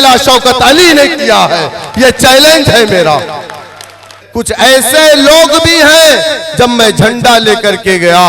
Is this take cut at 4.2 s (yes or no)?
yes